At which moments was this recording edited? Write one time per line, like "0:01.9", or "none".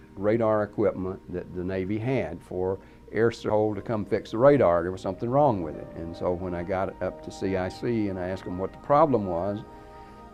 none